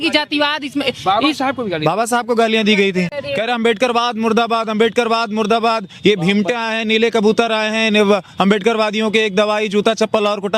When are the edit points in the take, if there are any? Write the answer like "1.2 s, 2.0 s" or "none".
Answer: none